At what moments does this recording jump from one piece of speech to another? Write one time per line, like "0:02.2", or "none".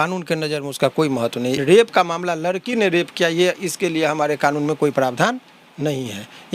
0:01.6